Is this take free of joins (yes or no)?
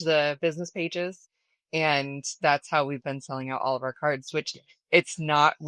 yes